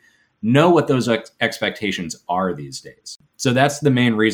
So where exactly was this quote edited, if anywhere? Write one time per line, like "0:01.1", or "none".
0:03.2